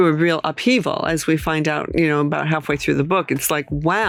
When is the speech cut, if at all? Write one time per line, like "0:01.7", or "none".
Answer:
none